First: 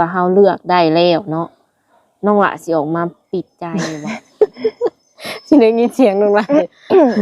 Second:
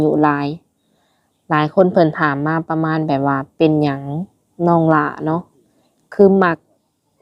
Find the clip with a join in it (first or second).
first